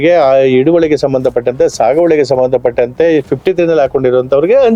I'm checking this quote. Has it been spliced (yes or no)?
no